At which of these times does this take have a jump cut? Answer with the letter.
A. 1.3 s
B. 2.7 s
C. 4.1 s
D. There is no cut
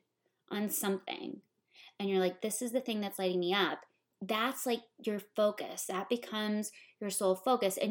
C